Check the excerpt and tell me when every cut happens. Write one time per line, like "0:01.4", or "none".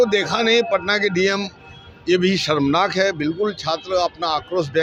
none